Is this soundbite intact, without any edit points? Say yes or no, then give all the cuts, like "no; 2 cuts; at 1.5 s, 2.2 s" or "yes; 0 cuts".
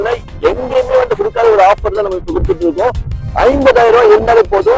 yes; 0 cuts